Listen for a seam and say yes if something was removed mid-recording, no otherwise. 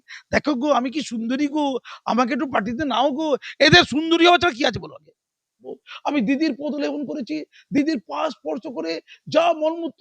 yes